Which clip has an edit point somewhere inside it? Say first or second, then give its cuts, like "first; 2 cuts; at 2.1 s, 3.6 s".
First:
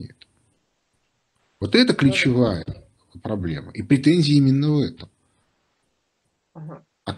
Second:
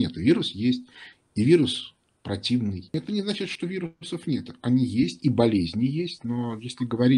second; 1 cut; at 3.4 s